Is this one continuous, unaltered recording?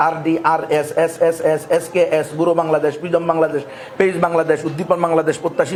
yes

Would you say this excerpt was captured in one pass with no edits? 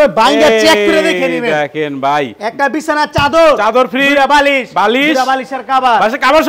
yes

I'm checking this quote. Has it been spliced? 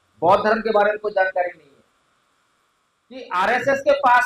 yes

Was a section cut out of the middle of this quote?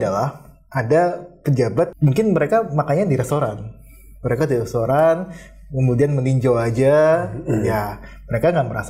yes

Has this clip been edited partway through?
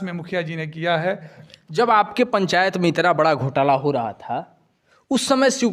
yes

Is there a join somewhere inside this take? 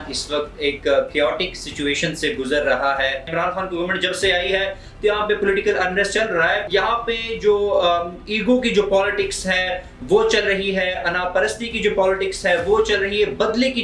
yes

